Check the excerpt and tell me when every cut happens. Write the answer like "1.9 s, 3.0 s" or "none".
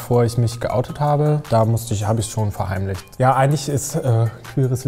1.4 s, 3.1 s